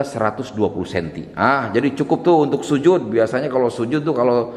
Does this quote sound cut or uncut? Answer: uncut